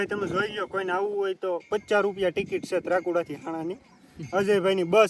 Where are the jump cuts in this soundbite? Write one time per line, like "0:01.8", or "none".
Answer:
none